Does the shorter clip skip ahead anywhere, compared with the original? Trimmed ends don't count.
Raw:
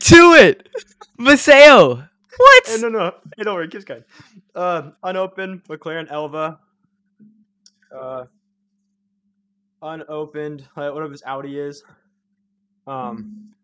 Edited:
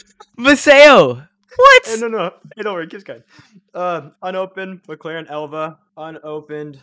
yes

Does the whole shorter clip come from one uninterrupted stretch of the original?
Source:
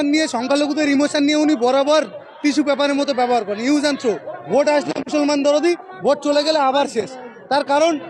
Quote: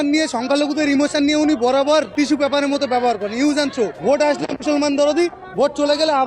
no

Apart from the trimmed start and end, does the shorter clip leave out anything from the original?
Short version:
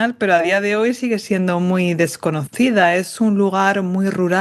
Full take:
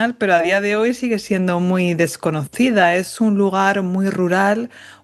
no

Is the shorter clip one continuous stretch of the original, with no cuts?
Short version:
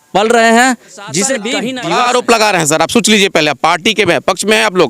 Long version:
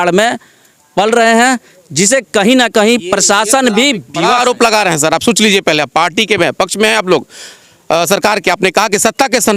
no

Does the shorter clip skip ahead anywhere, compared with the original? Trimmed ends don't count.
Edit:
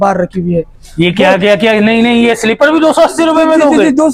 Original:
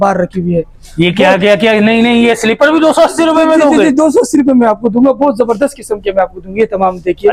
no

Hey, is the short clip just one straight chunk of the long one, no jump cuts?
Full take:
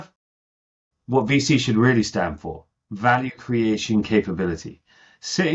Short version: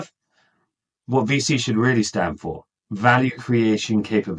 yes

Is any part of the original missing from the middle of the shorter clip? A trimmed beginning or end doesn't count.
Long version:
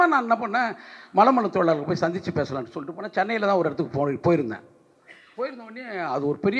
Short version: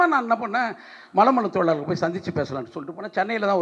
no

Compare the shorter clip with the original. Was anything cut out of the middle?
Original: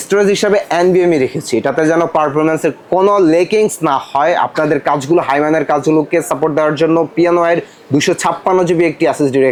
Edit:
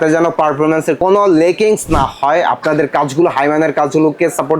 yes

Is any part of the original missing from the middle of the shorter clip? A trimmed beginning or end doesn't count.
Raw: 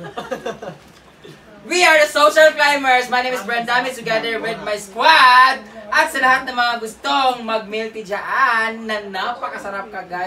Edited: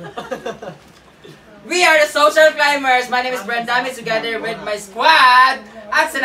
no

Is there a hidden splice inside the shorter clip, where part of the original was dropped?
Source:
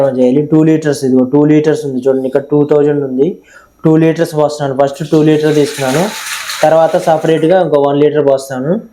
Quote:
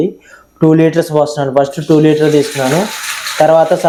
no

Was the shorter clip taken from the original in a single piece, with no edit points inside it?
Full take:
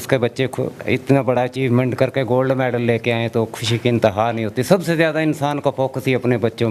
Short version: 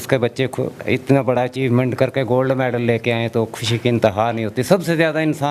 yes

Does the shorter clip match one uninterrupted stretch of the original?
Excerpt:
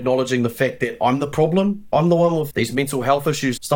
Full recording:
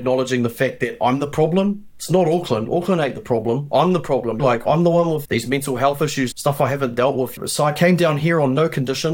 no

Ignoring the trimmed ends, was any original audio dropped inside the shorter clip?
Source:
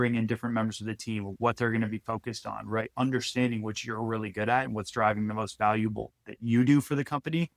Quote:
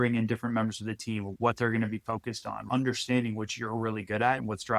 yes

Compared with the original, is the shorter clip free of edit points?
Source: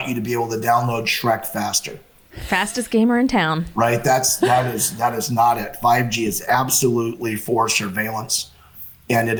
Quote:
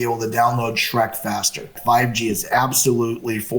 no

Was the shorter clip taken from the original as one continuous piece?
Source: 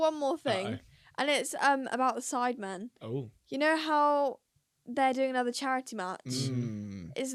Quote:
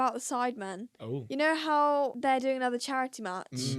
no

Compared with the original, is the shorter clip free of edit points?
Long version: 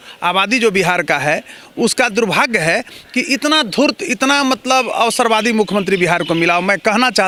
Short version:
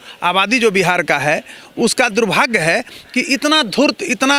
yes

